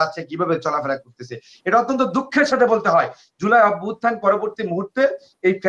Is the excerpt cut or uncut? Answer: uncut